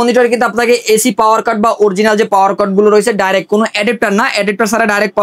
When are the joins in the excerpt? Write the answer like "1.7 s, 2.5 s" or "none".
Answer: none